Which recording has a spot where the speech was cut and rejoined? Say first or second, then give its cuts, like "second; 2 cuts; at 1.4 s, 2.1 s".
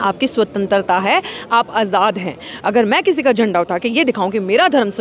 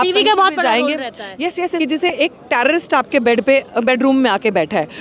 second; 1 cut; at 1.7 s